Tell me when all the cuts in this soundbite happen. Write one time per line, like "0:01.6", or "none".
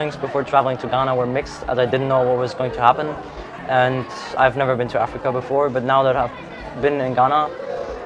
none